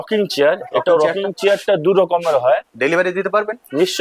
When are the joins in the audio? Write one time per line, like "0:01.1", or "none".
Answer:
0:02.7